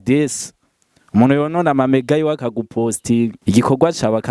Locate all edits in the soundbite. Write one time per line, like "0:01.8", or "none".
0:03.4